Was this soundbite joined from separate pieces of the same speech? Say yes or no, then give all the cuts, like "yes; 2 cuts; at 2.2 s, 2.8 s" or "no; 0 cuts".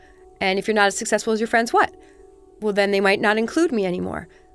no; 0 cuts